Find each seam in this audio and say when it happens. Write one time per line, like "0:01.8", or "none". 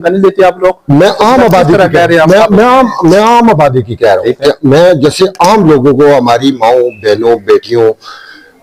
none

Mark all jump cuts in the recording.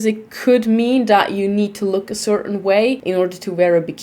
0:03.0

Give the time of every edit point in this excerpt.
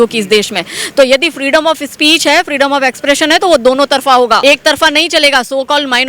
0:04.4

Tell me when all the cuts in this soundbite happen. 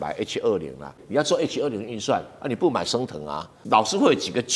0:01.0
0:03.6

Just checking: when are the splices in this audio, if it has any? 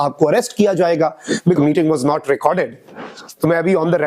0:01.6

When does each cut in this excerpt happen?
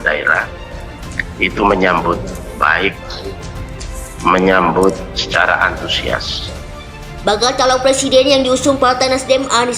0:06.6

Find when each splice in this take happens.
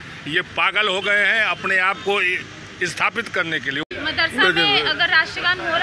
0:03.8

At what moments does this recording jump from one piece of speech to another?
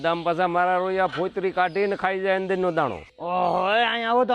0:03.0

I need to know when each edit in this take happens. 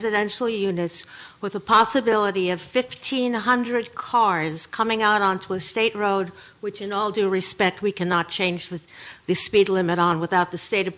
none

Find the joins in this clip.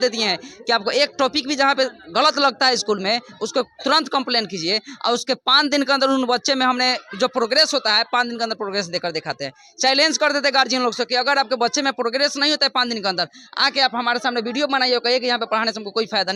none

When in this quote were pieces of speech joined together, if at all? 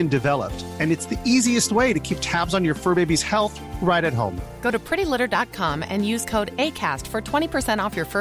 none

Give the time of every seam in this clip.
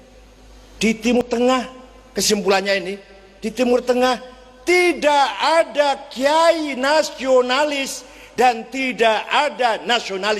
0:01.2

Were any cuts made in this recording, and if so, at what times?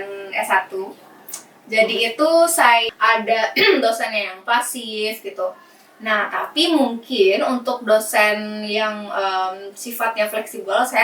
0:02.9

